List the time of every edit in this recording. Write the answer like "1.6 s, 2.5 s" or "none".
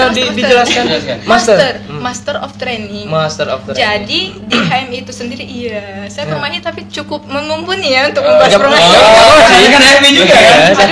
none